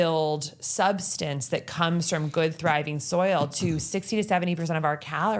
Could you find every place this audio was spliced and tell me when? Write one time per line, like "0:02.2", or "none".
none